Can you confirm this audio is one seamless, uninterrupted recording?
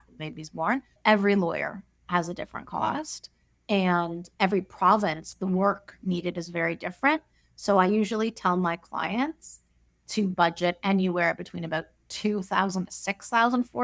no; 1 cut; at 0.9 s

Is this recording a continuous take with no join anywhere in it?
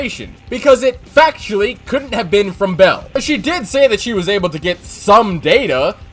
yes; 0 cuts

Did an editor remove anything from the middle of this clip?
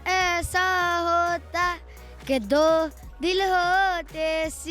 no; 0 cuts

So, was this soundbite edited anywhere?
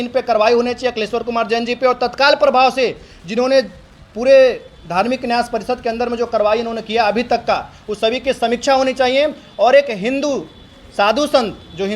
no; 0 cuts

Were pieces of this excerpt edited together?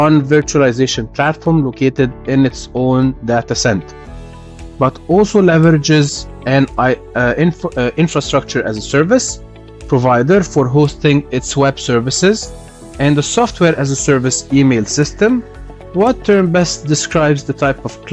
no; 0 cuts

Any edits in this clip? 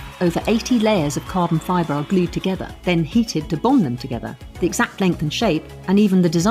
yes; 1 cut; at 2.7 s

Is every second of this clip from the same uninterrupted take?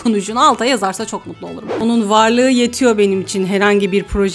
no; 1 cut; at 1.8 s

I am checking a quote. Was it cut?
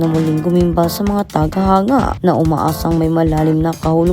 yes; 1 cut; at 2.2 s

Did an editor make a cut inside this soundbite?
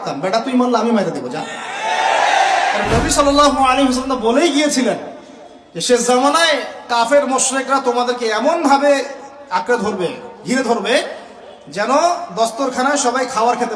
yes; 1 cut; at 2.8 s

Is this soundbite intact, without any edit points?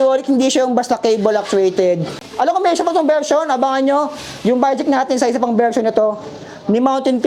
no; 1 cut; at 2.2 s

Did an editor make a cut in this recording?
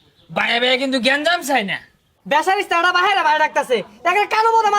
yes; 1 cut; at 2.1 s

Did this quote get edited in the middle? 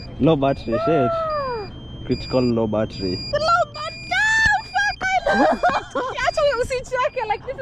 no; 0 cuts

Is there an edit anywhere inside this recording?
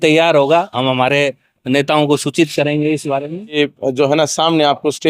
yes; 1 cut; at 3.6 s

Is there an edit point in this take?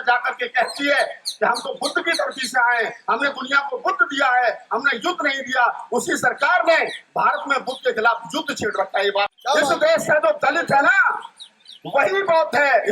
yes; 1 cut; at 9.3 s

